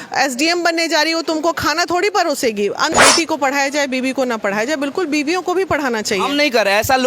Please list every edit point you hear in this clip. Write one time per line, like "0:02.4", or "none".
0:02.9